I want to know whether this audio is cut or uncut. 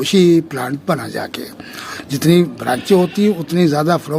cut